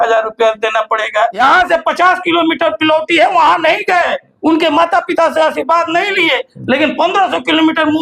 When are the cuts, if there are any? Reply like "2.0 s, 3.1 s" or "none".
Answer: 1.4 s